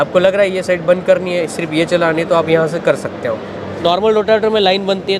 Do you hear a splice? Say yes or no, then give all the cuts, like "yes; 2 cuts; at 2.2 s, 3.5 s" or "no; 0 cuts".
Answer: yes; 1 cut; at 3.8 s